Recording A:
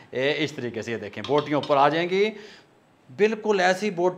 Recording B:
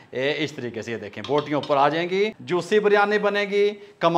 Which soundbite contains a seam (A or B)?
B